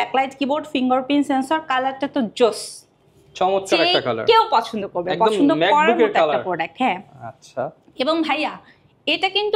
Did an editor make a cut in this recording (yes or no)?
no